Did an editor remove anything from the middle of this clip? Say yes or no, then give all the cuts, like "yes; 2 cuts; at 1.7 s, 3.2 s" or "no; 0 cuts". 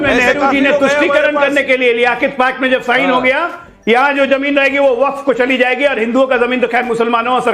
no; 0 cuts